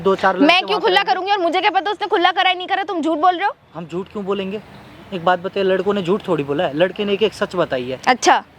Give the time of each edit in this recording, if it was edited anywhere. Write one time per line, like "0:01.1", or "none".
none